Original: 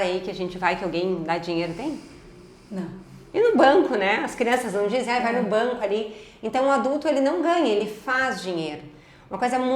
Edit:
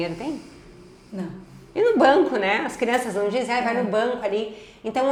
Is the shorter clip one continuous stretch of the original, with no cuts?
yes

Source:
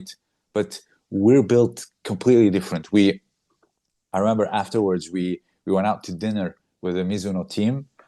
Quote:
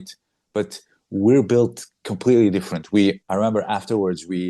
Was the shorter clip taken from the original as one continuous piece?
no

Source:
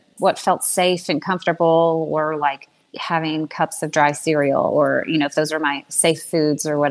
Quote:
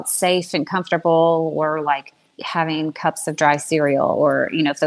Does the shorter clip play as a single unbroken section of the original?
yes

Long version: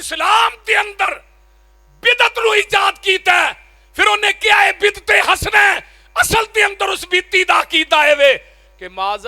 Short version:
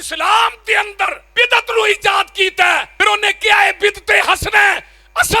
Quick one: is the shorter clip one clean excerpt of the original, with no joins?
no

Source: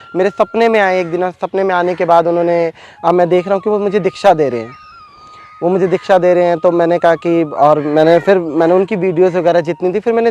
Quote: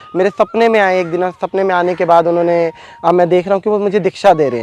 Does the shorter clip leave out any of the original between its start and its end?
no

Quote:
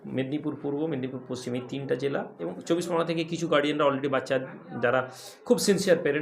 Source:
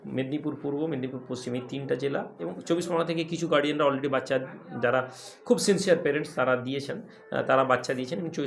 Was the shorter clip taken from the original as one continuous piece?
yes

